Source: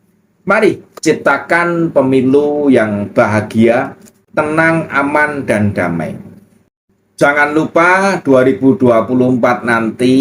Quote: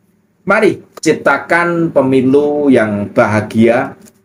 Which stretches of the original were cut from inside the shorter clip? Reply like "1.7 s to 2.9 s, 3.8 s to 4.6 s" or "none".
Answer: none